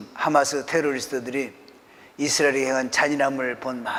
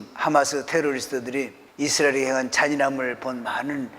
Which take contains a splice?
second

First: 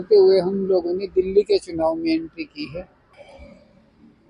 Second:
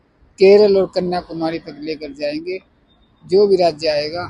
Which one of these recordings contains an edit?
first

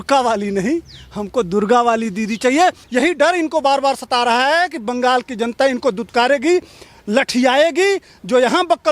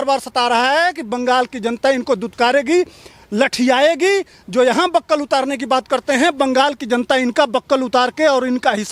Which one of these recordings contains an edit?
first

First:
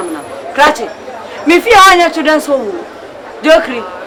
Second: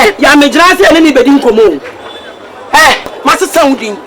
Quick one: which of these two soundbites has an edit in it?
second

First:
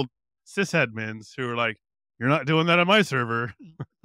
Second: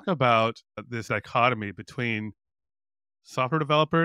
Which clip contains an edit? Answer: second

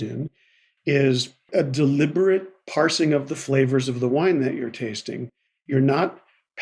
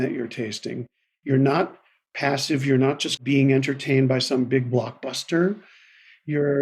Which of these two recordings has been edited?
second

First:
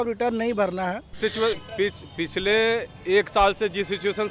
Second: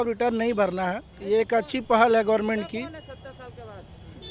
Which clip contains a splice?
first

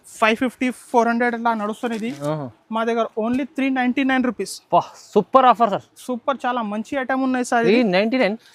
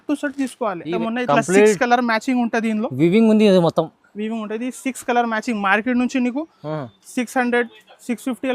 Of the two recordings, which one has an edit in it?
second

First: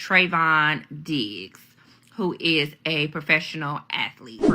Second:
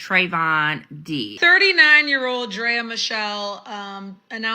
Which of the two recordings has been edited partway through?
second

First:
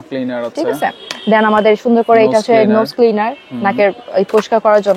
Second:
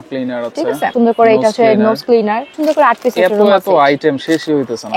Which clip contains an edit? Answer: second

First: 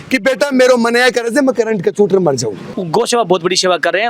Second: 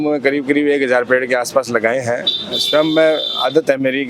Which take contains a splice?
first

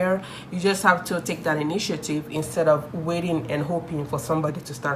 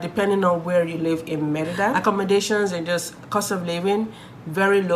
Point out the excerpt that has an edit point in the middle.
second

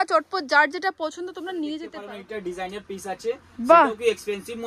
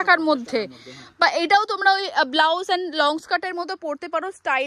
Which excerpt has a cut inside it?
first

